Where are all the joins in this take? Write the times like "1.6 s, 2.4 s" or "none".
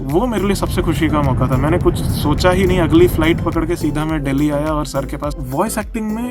5.4 s